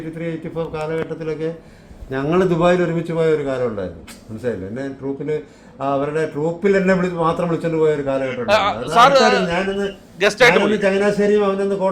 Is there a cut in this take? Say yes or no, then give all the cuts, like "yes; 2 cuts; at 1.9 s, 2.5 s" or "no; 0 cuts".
no; 0 cuts